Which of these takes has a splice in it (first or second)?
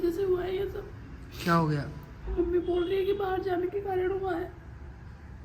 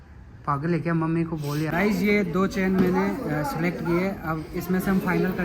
second